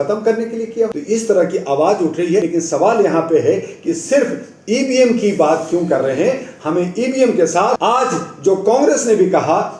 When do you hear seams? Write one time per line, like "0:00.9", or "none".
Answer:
0:00.9
0:02.5
0:07.8